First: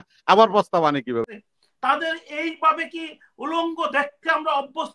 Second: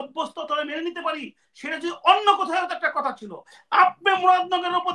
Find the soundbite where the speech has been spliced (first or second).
first